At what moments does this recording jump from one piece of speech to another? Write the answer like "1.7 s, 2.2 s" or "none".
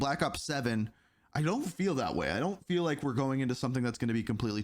none